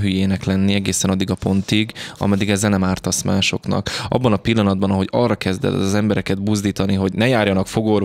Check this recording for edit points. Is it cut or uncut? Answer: uncut